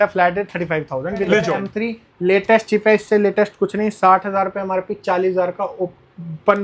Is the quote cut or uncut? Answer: cut